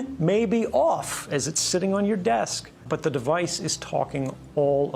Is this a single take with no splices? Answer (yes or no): no